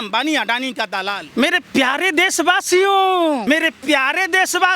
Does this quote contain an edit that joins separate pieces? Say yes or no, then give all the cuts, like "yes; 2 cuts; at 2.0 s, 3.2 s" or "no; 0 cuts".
yes; 2 cuts; at 1.2 s, 3.4 s